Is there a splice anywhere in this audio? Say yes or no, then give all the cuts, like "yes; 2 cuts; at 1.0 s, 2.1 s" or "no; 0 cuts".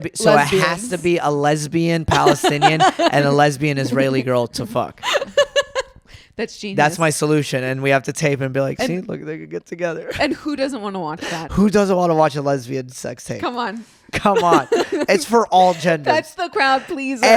no; 0 cuts